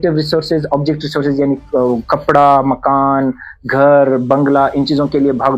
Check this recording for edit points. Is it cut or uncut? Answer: uncut